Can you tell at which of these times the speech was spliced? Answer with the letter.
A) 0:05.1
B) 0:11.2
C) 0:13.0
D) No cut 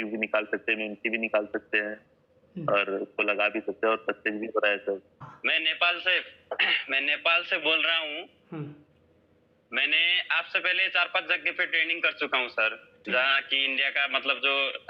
A